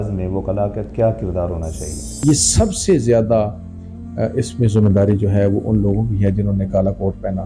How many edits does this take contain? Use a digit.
1